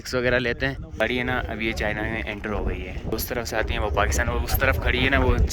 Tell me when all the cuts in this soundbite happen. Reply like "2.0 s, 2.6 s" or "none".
1.0 s, 3.1 s